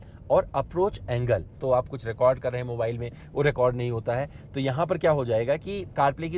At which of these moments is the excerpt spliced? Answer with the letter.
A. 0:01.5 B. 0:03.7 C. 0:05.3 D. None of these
A